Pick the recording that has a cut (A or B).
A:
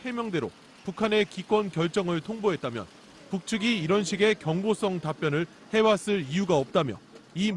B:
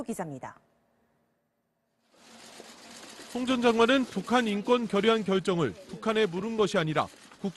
A